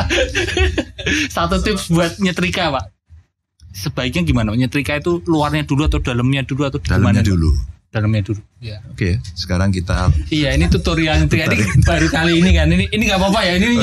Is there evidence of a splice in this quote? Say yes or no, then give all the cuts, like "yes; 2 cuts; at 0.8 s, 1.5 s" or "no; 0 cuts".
no; 0 cuts